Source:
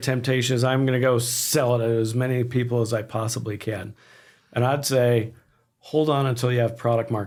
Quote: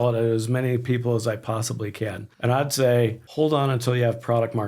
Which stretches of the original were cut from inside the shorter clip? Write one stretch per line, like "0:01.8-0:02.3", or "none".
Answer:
0:03.9-0:04.4
0:05.4-0:05.8